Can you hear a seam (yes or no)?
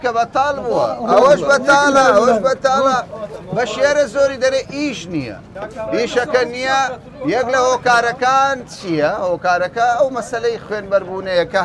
no